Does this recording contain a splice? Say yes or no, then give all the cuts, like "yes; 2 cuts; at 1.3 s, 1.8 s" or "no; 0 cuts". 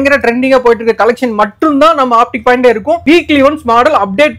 no; 0 cuts